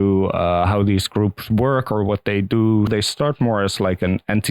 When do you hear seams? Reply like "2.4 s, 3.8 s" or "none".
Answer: 2.9 s